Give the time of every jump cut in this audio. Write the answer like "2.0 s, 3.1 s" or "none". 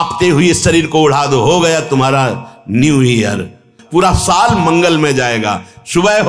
3.8 s